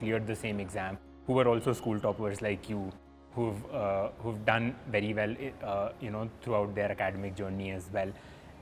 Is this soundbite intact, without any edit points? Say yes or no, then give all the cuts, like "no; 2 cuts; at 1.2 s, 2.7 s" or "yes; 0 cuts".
yes; 0 cuts